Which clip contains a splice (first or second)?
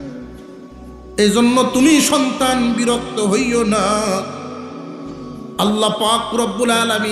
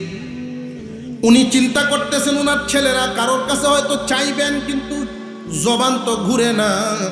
first